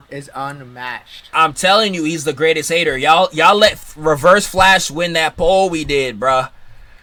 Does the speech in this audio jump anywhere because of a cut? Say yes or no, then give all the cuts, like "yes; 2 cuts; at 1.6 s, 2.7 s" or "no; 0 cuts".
no; 0 cuts